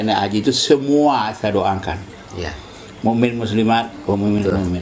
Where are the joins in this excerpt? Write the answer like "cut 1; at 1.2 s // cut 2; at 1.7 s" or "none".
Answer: none